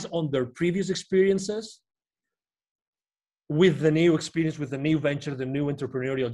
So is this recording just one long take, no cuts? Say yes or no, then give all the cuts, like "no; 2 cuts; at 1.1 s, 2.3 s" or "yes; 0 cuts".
yes; 0 cuts